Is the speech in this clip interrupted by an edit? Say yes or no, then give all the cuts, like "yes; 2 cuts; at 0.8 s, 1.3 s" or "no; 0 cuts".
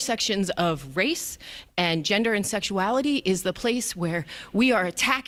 no; 0 cuts